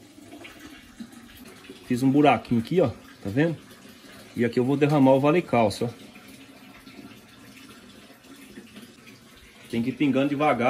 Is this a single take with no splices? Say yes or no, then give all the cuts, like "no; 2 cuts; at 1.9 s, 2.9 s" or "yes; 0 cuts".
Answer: no; 2 cuts; at 1.4 s, 9.0 s